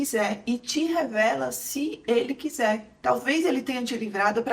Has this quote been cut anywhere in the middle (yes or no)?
yes